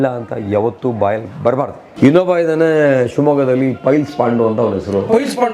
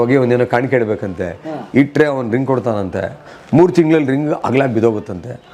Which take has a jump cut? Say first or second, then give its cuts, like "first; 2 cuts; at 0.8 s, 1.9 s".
first; 1 cut; at 1.8 s